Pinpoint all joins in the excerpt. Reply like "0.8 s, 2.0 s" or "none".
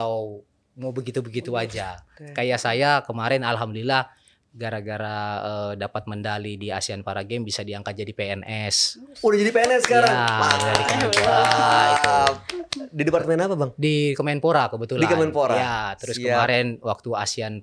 2.1 s